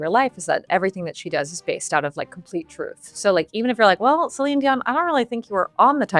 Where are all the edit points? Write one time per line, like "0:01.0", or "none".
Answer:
none